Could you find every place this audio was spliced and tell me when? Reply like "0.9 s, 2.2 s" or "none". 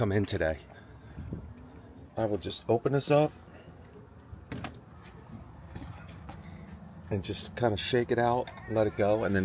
2.0 s